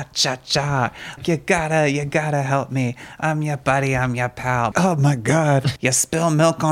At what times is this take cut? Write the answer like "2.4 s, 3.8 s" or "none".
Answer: 1.2 s, 4.7 s, 5.7 s